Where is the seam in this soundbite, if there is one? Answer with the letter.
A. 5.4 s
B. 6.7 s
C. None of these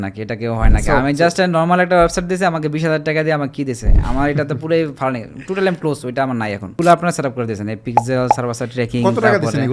B